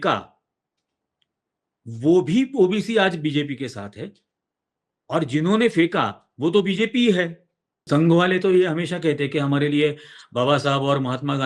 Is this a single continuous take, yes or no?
no